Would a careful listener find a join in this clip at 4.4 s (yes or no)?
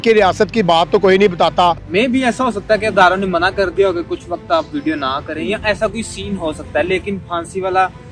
no